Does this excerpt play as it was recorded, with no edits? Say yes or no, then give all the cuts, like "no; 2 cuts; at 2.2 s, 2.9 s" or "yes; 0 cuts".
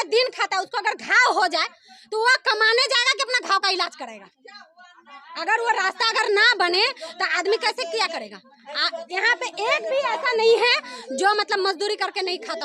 yes; 0 cuts